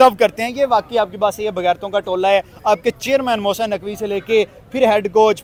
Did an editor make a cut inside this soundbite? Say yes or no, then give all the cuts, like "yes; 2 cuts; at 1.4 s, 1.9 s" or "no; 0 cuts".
no; 0 cuts